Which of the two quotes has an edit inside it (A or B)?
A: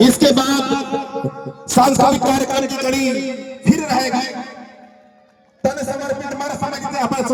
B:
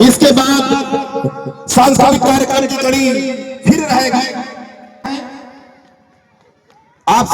B